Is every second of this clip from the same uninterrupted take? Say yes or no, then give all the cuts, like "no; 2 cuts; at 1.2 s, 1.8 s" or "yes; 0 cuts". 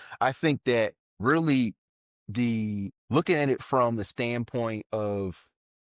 no; 2 cuts; at 1.1 s, 3.0 s